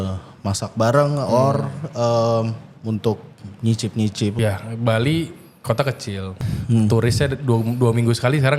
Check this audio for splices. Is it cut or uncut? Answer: cut